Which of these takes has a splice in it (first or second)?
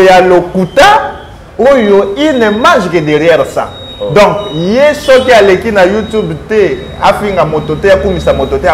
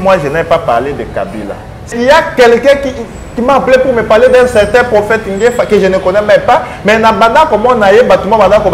second